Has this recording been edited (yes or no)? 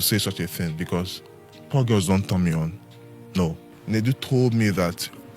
yes